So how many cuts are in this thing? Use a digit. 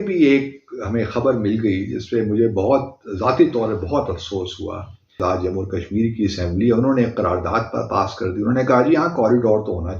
1